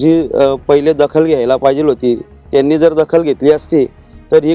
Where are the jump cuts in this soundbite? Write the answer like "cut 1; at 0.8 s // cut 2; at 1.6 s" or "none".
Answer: none